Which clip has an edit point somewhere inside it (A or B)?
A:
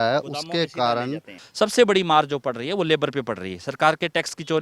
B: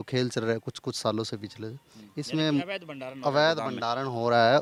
A